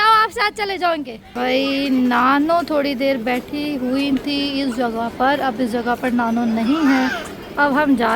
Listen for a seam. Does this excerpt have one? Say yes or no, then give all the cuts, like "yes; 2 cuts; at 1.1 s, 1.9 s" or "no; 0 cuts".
yes; 1 cut; at 1.3 s